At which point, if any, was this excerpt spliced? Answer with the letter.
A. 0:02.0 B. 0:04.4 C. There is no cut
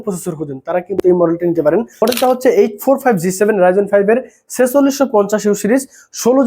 A